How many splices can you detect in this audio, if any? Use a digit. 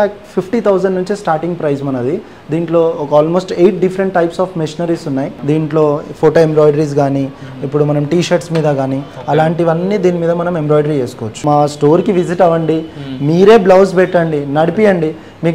2